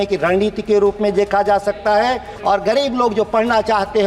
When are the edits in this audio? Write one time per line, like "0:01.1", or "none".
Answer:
0:02.3